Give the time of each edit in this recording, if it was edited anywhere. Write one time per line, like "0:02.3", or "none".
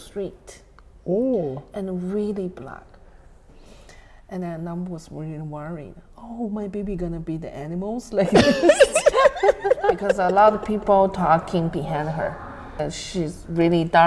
0:03.4
0:10.2
0:12.8